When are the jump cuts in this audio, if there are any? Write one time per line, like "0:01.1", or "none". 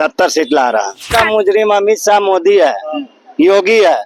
0:01.1